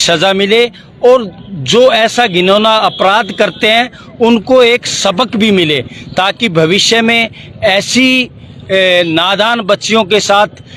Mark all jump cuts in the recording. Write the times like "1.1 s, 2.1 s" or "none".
none

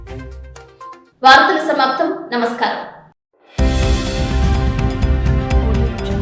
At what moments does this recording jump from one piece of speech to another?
none

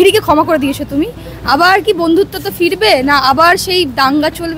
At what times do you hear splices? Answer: none

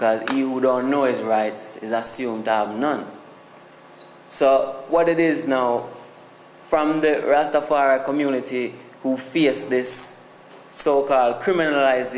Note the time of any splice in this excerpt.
3.3 s

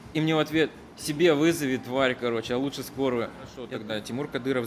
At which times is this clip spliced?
3.7 s

